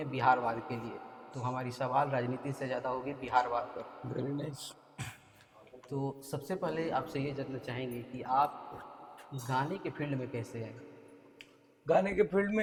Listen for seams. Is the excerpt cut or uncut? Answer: uncut